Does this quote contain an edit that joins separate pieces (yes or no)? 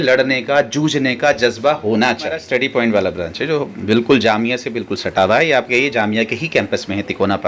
yes